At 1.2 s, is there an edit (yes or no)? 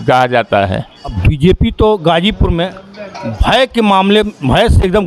yes